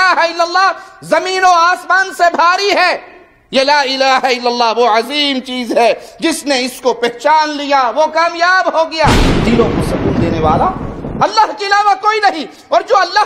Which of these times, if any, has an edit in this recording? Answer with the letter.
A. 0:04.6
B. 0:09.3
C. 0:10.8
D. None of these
B